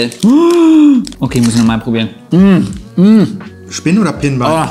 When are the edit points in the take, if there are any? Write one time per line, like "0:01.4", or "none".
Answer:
none